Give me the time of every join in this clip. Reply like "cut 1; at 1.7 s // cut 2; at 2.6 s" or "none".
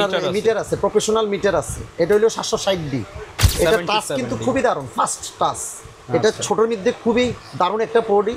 cut 1; at 3.5 s